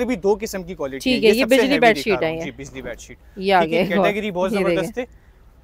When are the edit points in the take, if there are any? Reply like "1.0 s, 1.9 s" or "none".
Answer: none